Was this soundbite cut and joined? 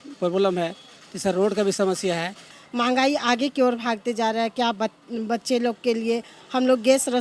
yes; 1 cut; at 2.5 s

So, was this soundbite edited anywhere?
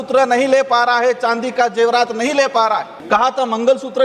yes; 1 cut; at 2.9 s

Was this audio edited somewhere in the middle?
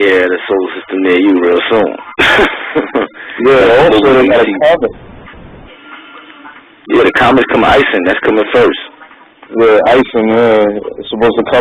yes; 1 cut; at 7.6 s

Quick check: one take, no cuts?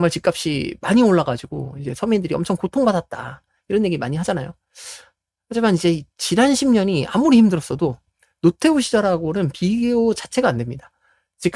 yes; 0 cuts

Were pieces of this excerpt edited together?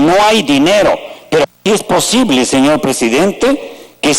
yes; 1 cut; at 1.6 s

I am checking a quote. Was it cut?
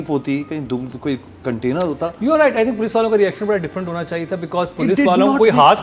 no; 0 cuts

